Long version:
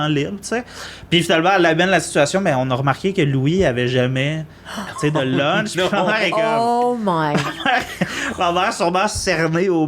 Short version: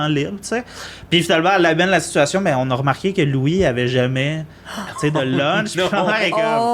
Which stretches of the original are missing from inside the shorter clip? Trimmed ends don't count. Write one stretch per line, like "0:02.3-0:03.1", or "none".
none